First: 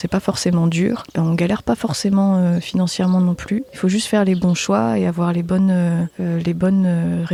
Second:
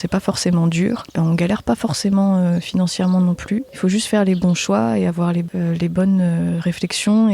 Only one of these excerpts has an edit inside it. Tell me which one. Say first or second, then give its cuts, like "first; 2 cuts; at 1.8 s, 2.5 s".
second; 1 cut; at 5.5 s